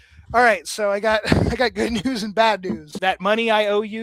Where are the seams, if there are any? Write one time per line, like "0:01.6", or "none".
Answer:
0:02.9